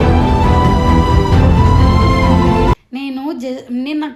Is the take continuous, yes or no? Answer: yes